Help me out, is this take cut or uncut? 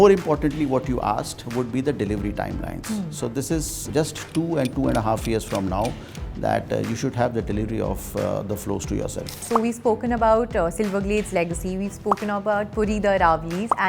cut